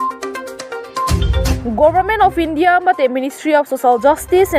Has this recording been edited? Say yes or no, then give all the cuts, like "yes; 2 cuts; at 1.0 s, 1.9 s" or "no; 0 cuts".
yes; 1 cut; at 1.6 s